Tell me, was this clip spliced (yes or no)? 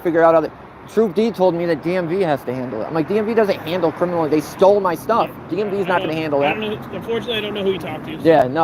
no